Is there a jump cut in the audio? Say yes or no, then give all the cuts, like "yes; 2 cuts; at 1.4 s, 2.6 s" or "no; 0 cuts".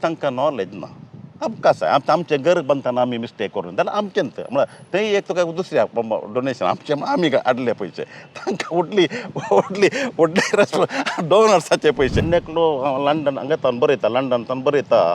yes; 1 cut; at 12.2 s